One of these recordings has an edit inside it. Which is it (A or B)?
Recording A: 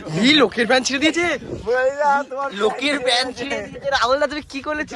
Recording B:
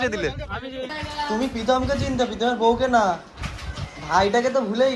B